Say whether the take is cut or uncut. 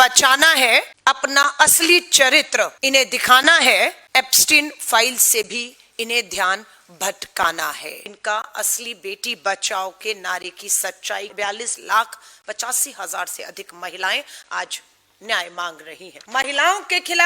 cut